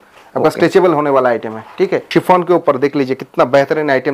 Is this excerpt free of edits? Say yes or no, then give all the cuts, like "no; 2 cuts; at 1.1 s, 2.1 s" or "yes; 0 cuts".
no; 1 cut; at 2.1 s